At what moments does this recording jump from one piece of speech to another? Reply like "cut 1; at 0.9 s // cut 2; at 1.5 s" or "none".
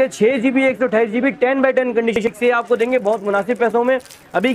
cut 1; at 2.1 s